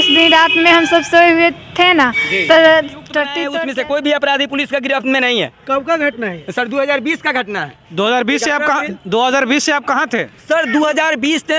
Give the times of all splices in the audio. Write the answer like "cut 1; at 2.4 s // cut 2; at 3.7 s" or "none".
cut 1; at 3.4 s